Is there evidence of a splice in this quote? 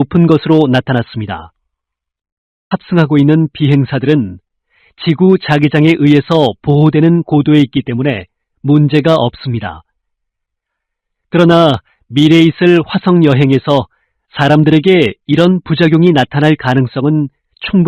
yes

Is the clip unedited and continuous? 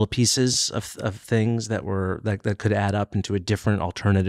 yes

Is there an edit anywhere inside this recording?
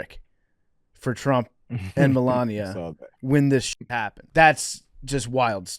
yes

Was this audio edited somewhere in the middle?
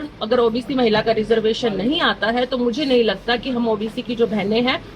no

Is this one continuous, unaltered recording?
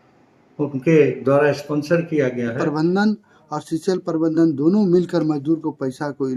no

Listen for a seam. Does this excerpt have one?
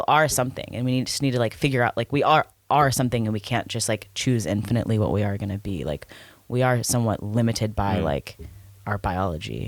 no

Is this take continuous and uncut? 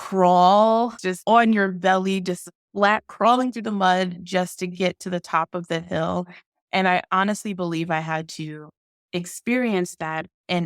no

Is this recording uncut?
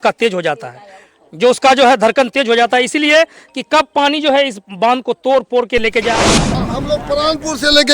no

